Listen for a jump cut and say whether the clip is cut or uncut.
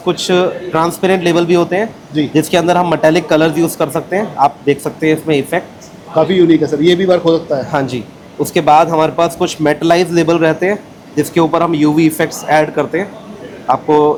uncut